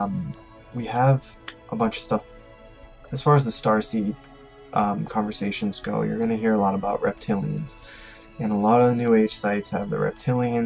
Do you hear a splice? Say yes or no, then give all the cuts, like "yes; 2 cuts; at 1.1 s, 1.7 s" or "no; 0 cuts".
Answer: yes; 1 cut; at 4.7 s